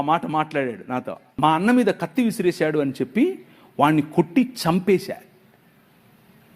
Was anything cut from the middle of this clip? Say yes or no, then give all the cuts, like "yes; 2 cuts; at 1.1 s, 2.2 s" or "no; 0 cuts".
yes; 1 cut; at 1.2 s